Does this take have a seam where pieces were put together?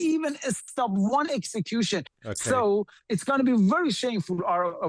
yes; 1 cut; at 2.1 s

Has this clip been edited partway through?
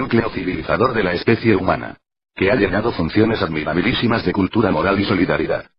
yes; 1 cut; at 1.0 s

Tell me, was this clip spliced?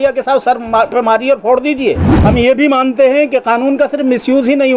yes; 1 cut; at 2.1 s

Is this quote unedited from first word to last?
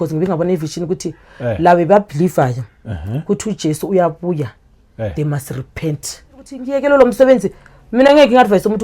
no; 1 cut; at 6.6 s

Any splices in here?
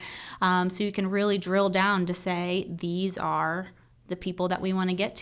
no; 0 cuts

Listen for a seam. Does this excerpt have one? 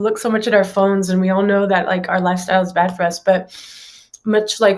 no; 0 cuts

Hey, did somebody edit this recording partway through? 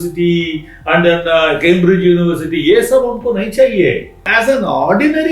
yes; 1 cut; at 4.3 s

